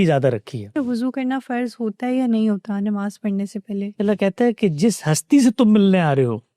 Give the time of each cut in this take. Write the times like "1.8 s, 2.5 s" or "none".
0.7 s, 4.0 s